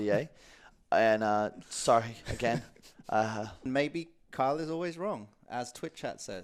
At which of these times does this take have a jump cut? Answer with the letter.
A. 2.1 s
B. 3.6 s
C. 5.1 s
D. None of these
B